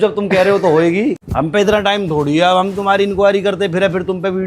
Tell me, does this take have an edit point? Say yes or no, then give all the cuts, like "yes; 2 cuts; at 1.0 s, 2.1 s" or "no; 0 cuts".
yes; 1 cut; at 1.3 s